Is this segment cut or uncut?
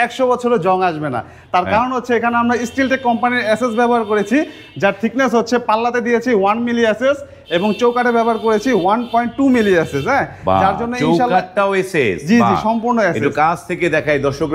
uncut